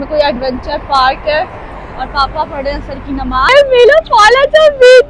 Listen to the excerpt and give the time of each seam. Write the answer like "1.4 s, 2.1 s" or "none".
3.5 s